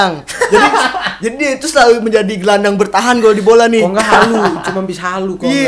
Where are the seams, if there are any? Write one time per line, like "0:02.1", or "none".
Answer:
none